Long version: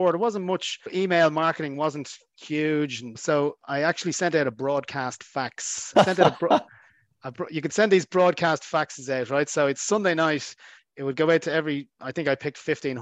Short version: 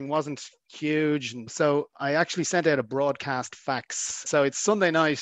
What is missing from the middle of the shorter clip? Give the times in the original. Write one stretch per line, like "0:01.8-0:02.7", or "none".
0:05.9-0:09.5